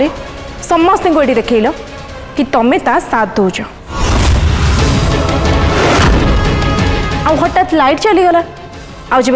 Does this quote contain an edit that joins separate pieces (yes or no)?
yes